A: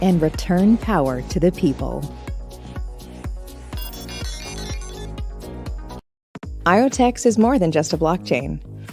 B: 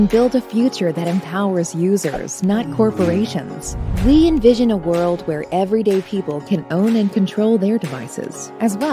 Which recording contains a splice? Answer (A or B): A